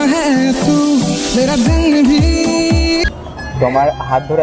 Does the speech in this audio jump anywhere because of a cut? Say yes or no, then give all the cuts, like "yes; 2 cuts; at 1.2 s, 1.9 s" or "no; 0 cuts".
yes; 1 cut; at 3.0 s